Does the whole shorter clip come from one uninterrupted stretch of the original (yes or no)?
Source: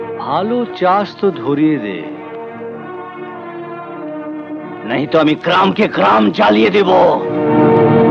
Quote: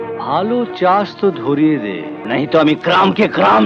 no